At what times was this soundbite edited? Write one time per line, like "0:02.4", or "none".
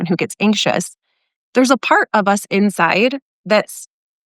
none